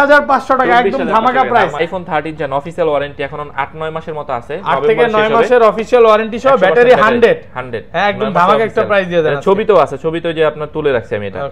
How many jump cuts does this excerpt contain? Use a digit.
1